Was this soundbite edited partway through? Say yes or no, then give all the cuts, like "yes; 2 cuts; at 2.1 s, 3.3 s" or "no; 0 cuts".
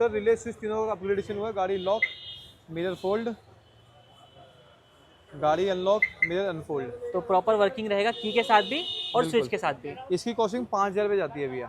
no; 0 cuts